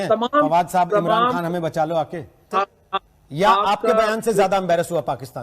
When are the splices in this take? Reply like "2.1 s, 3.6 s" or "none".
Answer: 2.5 s